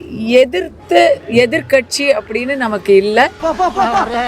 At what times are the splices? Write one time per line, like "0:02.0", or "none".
0:03.4